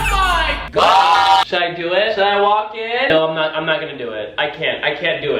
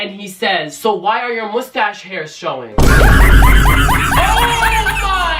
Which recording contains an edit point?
first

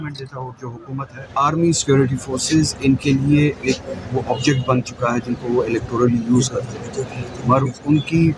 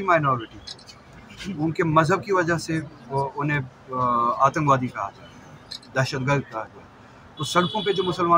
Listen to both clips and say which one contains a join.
first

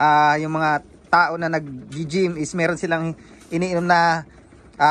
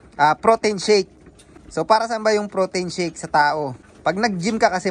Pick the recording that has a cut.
second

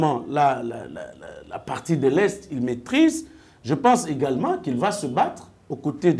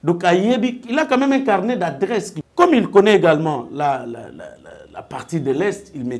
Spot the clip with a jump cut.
second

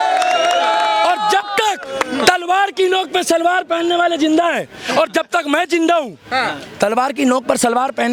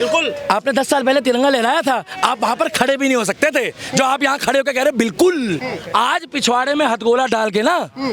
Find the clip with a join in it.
second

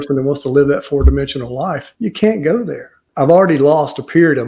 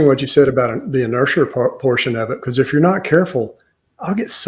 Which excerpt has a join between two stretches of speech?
first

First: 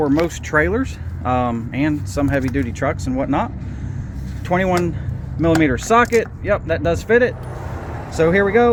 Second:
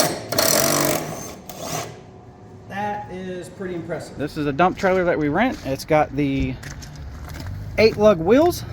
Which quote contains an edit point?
second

